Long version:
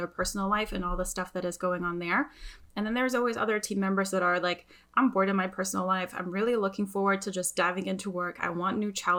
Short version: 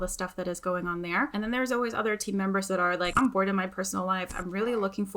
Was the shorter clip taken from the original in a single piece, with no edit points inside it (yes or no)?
no